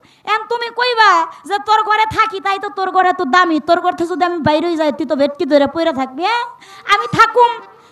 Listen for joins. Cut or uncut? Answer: uncut